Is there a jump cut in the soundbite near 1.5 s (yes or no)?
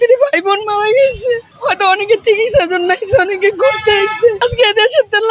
yes